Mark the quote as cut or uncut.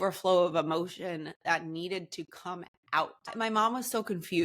cut